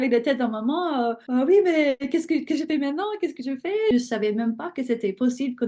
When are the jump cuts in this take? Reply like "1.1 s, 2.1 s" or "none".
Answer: 1.2 s, 2.0 s, 3.9 s